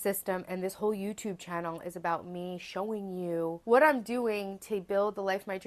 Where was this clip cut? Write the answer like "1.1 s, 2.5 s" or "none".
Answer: 3.6 s